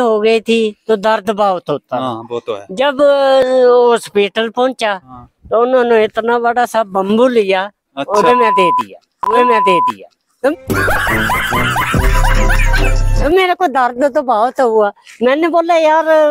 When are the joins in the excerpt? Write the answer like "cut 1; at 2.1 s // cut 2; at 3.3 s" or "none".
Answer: none